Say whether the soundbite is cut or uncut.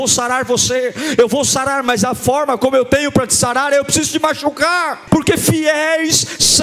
cut